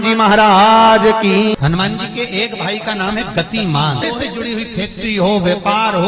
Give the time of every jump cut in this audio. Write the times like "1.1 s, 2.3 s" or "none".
1.5 s, 4.0 s